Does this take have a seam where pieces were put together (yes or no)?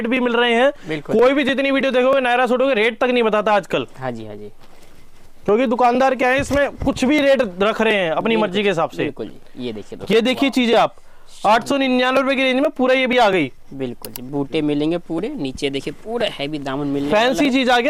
no